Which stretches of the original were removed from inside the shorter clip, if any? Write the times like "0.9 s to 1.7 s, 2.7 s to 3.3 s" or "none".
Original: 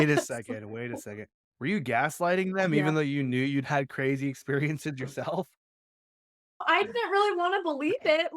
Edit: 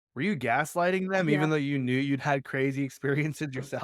none